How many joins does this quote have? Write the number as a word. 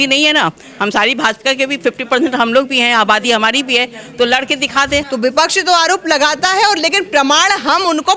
one